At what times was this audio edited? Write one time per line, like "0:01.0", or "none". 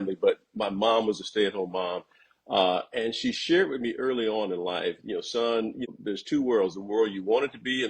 0:05.9